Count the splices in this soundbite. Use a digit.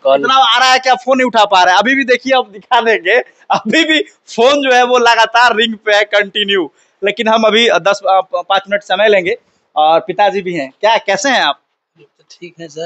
0